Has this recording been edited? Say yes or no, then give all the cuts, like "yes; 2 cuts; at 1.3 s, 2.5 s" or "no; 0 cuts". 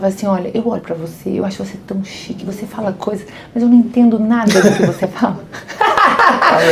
no; 0 cuts